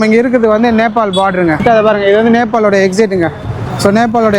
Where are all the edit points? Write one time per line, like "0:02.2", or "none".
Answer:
0:01.6